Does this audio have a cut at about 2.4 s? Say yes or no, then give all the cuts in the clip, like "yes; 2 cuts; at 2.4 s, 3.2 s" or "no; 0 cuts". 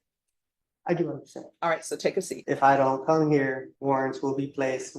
yes; 2 cuts; at 2.4 s, 3.7 s